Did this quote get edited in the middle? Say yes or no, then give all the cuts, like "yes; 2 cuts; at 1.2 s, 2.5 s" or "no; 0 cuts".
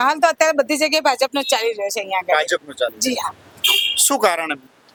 no; 0 cuts